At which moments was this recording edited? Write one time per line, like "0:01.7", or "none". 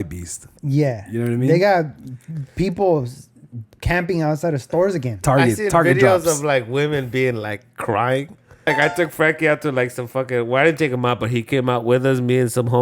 0:08.7